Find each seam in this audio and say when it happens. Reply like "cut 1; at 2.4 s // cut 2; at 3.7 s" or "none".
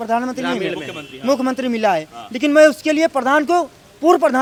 none